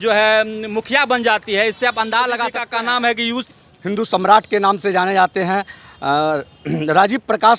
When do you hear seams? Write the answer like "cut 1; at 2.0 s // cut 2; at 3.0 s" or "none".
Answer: cut 1; at 2.6 s // cut 2; at 3.5 s